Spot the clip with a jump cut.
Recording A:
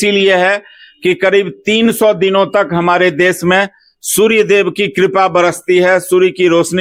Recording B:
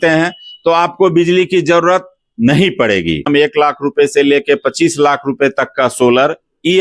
B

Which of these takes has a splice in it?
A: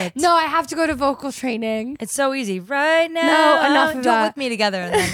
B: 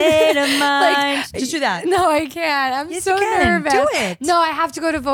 A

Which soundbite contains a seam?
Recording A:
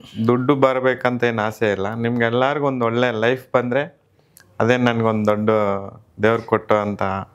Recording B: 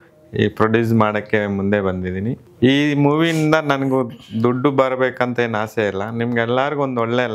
B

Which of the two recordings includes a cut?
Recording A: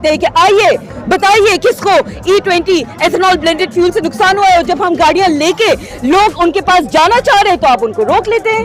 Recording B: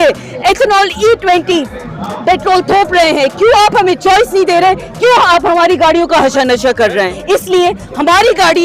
B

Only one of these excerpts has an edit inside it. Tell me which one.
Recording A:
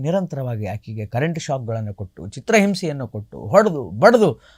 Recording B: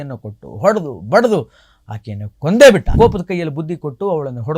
B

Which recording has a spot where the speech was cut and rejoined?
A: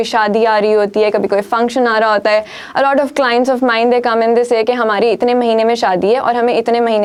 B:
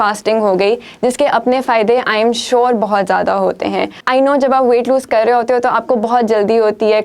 B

